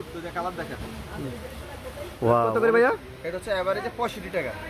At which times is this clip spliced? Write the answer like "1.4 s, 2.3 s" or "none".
2.5 s